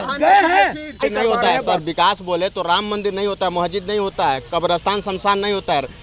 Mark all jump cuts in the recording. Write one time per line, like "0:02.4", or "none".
0:01.0